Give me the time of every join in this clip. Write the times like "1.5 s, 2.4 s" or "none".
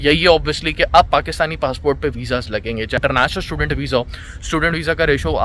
3.0 s